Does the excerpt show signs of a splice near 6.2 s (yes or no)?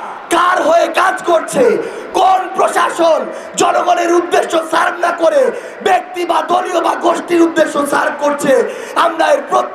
no